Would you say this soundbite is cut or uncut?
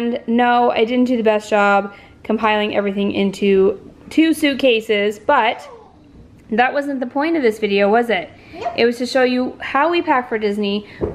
uncut